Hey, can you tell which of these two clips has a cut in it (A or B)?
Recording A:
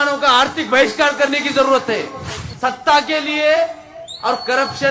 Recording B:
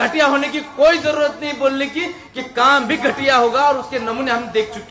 A